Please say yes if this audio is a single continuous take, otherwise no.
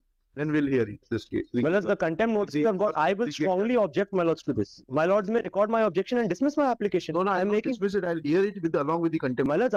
yes